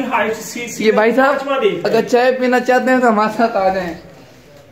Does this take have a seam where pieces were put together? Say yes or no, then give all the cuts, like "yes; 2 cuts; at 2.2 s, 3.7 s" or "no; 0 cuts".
no; 0 cuts